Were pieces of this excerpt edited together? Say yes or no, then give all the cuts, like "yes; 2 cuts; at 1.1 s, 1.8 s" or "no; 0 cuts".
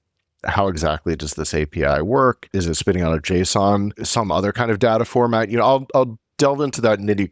yes; 1 cut; at 2.5 s